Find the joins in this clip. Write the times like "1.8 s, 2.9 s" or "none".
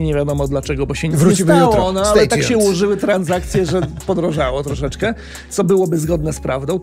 none